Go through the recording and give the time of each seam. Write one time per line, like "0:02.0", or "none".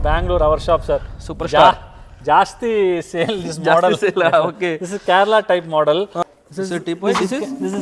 0:06.2